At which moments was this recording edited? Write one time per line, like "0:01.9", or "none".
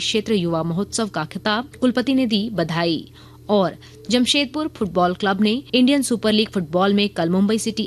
0:01.7
0:05.6